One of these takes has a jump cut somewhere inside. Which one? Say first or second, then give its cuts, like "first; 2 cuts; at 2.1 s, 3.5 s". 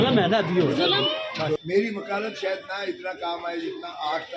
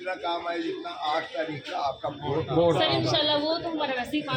first; 1 cut; at 1.6 s